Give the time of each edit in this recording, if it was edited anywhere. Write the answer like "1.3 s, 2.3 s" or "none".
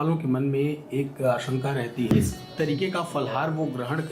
2.1 s